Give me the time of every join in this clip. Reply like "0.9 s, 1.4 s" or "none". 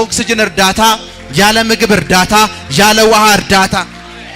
none